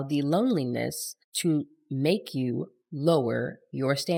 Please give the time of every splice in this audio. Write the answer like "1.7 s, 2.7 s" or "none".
none